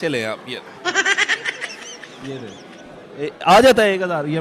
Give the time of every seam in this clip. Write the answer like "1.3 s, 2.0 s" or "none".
none